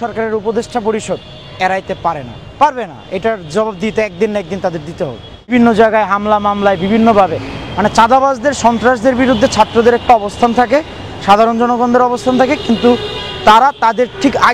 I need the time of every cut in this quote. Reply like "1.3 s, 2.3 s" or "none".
5.5 s

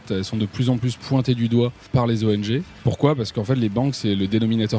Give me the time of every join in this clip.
1.9 s, 2.7 s

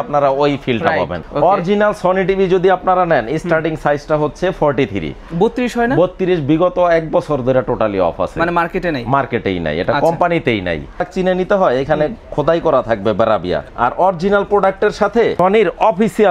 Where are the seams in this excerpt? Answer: 1.2 s, 11.0 s, 13.7 s, 15.4 s

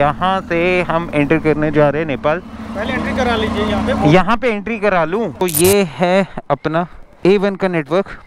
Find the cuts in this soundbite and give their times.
2.6 s, 5.4 s, 7.0 s

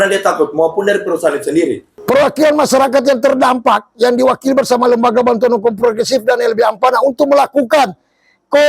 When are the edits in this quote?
1.9 s

